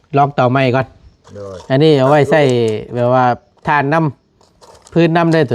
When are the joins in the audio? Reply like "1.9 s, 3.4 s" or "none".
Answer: none